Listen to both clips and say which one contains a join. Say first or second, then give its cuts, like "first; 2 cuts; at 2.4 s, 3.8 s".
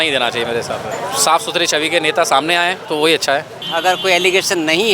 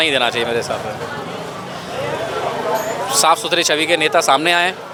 first; 3 cuts; at 0.9 s, 2.8 s, 3.6 s